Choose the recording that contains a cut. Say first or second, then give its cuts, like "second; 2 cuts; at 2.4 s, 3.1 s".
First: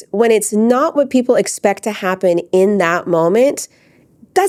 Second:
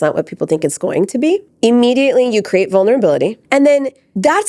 second; 2 cuts; at 1.5 s, 3.5 s